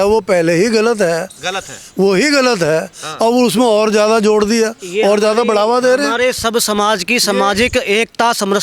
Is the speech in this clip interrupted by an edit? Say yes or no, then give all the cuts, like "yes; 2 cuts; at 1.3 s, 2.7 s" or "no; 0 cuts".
no; 0 cuts